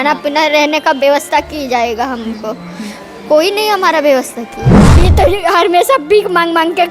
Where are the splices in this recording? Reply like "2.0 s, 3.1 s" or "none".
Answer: 4.8 s